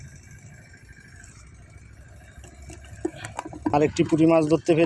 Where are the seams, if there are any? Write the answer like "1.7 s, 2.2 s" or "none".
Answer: 3.7 s